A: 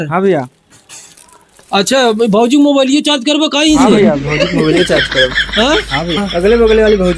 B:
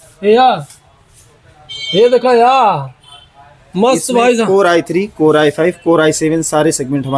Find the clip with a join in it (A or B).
A